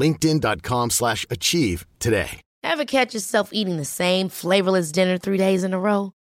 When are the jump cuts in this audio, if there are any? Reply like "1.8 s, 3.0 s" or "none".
2.4 s